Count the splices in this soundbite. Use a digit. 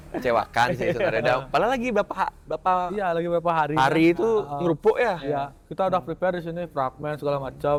0